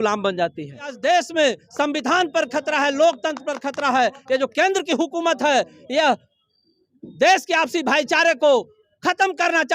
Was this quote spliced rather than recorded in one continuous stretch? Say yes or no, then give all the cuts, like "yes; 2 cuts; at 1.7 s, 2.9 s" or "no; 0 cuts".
yes; 1 cut; at 0.9 s